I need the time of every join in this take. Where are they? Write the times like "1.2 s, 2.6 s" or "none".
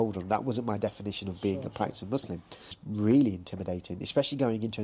2.8 s